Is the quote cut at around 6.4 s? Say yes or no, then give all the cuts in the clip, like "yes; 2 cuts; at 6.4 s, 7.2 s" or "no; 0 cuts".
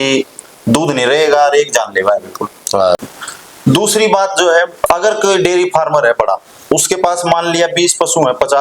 no; 1 cut; at 3.0 s